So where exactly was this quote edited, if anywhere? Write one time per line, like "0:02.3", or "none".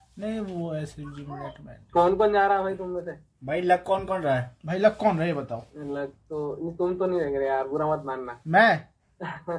none